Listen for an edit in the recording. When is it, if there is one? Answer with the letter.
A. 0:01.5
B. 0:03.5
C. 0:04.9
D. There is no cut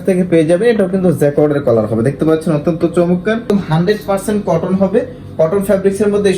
B